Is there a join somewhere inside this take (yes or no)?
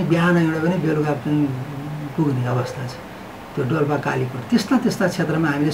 no